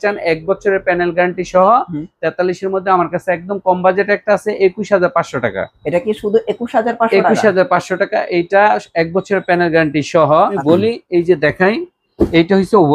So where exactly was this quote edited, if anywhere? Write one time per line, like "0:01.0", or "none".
0:10.6